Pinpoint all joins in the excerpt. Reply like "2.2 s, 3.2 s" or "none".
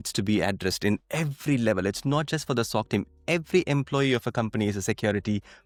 none